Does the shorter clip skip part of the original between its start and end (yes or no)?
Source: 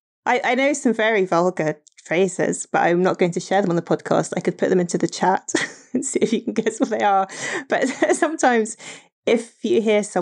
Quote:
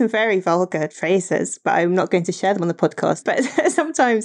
yes